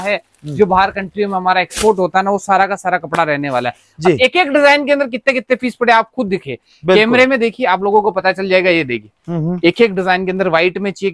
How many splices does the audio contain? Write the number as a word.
zero